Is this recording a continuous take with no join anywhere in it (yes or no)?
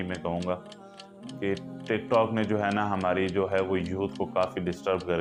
yes